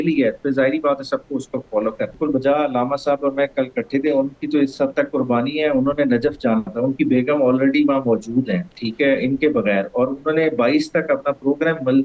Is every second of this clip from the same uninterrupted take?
no; 1 cut; at 2.1 s

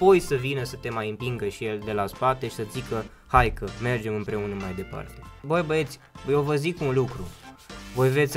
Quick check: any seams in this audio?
yes; 1 cut; at 5.4 s

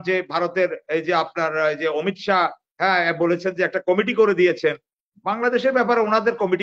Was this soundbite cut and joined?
no; 0 cuts

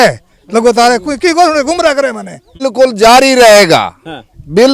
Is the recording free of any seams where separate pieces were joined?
no; 1 cut; at 2.6 s

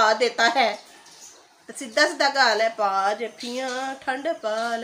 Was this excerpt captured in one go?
yes; 0 cuts

